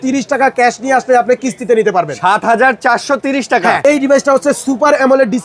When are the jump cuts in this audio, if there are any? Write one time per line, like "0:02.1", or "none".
0:03.8

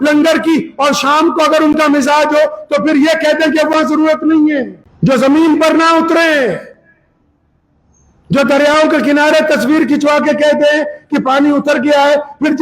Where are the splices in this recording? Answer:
0:04.8

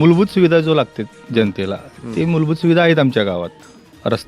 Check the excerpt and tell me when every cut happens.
none

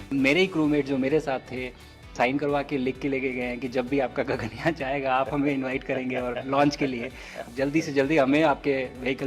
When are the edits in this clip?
0:02.1
0:07.4

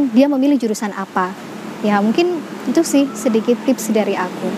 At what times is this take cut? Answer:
0:01.4

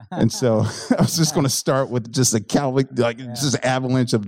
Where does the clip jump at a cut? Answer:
none

